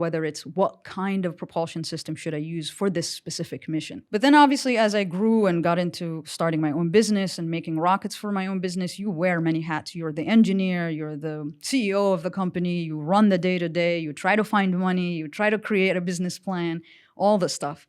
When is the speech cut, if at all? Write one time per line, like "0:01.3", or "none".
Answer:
0:04.0